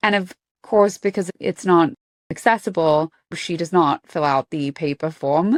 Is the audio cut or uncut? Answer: uncut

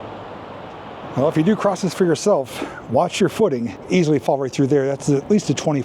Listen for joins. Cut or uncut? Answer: cut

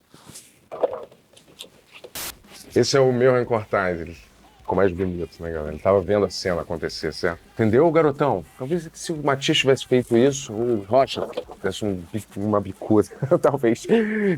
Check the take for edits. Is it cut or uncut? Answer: cut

